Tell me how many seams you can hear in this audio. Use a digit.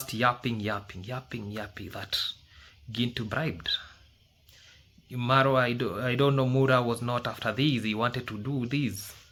0